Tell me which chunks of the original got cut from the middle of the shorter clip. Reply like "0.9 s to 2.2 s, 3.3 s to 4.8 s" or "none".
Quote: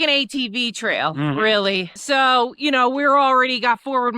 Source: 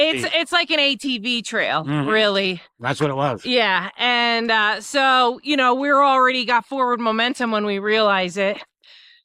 2.7 s to 4.8 s